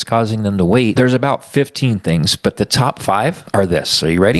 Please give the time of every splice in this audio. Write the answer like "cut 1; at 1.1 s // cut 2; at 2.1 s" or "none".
cut 1; at 0.9 s // cut 2; at 3.4 s